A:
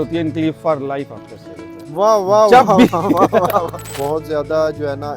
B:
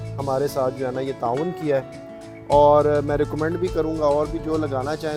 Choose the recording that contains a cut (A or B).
A